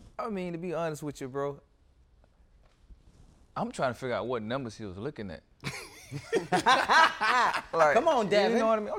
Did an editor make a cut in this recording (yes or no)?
no